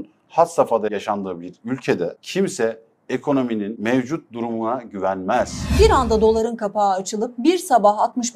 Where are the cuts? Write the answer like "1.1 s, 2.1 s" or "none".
0.9 s, 2.2 s, 3.7 s, 5.7 s